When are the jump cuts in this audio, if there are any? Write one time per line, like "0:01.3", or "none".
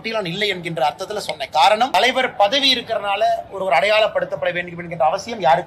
0:01.9

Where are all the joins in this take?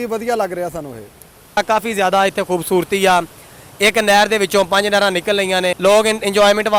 0:01.6
0:05.8

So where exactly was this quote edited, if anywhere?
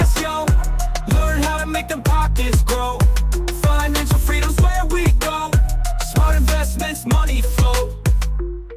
none

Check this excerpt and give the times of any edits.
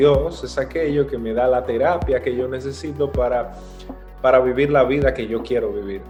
none

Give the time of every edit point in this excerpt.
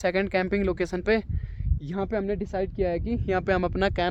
none

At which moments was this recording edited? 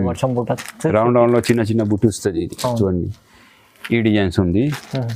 none

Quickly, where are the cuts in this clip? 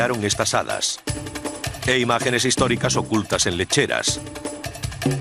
0:02.8

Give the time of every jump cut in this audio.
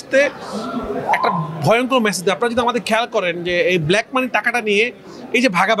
none

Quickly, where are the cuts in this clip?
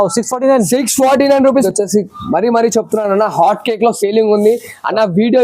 0:01.6

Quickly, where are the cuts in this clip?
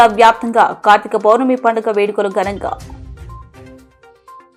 none

